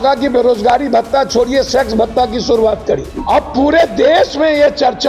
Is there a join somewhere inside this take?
yes; 1 cut; at 3.1 s

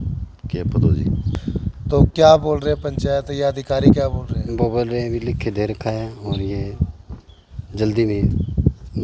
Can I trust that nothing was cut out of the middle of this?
no; 1 cut; at 1.3 s

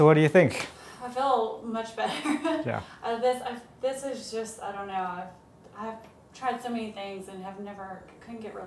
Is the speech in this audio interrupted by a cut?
no; 0 cuts

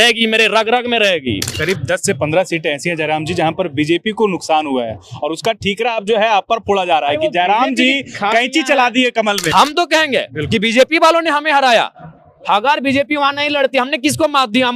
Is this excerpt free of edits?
no; 2 cuts; at 1.5 s, 9.4 s

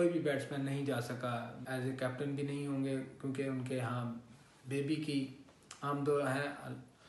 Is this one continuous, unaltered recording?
no; 1 cut; at 1.6 s

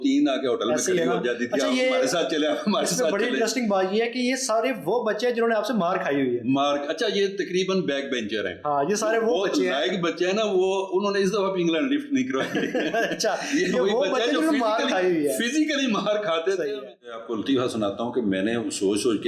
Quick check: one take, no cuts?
no; 1 cut; at 17.1 s

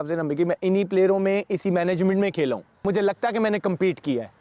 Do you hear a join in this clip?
yes; 1 cut; at 2.8 s

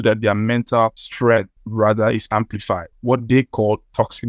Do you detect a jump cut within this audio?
yes; 3 cuts; at 1.0 s, 1.6 s, 2.9 s

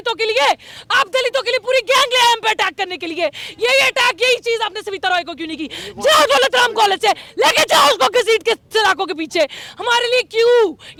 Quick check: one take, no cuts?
yes; 0 cuts

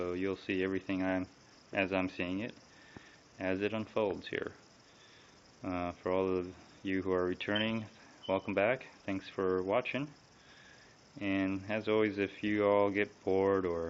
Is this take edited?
yes; 1 cut; at 10.3 s

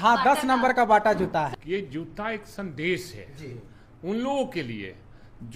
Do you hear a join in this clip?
yes; 1 cut; at 1.6 s

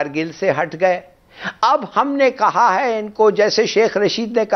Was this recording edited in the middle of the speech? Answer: no; 0 cuts

